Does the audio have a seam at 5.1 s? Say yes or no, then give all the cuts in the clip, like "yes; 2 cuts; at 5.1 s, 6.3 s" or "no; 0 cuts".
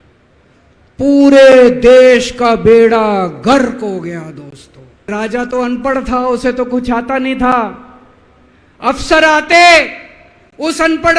yes; 1 cut; at 5.1 s